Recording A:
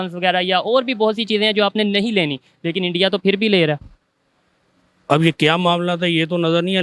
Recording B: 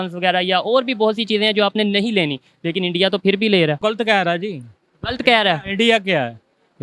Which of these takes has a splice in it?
B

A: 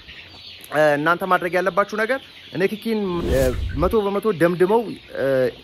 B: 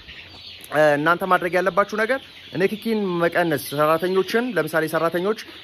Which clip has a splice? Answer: A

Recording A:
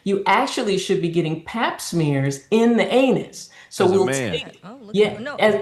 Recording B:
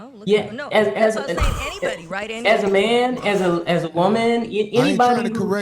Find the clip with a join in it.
B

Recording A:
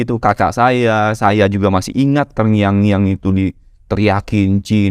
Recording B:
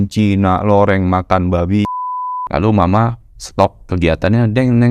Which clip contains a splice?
B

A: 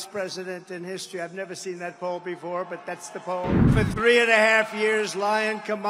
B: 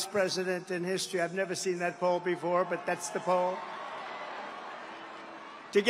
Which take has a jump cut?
A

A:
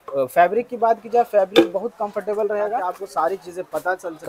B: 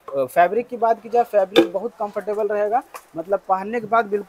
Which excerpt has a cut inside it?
A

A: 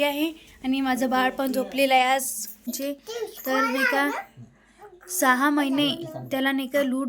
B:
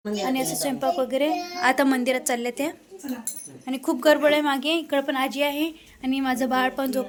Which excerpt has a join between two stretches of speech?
A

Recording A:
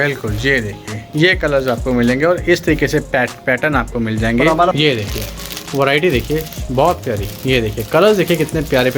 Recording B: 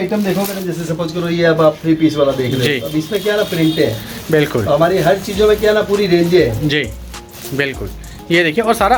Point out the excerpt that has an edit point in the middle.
A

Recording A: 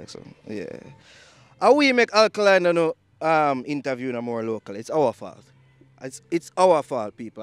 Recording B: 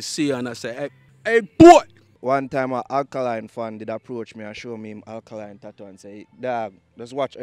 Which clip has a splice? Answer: B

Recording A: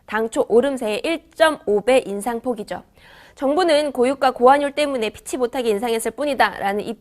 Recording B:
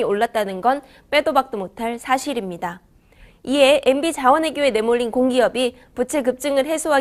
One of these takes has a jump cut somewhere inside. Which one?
A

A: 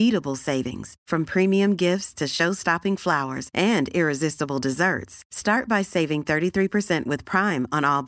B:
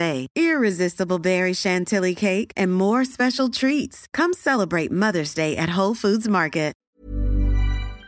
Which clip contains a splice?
B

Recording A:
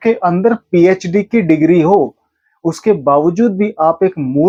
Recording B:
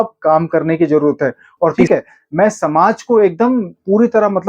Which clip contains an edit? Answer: B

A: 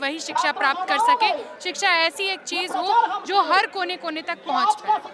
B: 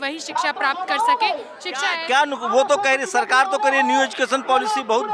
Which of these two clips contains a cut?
B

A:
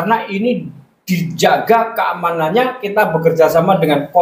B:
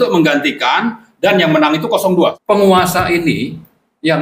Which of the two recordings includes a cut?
B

